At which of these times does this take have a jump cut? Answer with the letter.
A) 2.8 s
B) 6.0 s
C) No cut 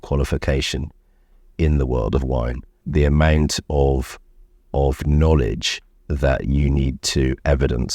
A